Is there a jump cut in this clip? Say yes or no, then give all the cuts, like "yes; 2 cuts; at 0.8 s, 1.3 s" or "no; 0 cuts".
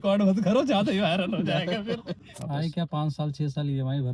yes; 1 cut; at 2.3 s